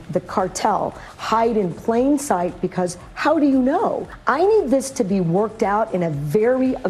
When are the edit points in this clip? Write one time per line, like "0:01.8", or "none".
none